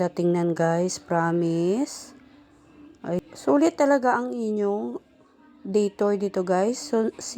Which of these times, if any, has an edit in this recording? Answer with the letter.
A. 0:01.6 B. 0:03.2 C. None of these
B